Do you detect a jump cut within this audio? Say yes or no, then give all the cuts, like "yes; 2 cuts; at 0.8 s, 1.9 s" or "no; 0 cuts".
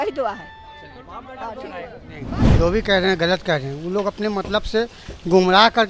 yes; 1 cut; at 2.4 s